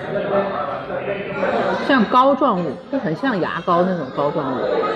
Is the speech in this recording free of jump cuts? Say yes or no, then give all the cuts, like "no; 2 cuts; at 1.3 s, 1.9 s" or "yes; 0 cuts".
yes; 0 cuts